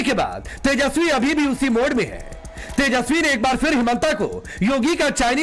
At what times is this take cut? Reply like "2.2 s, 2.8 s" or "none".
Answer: none